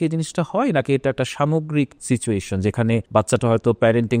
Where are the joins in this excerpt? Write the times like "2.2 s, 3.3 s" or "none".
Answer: 2.0 s, 3.1 s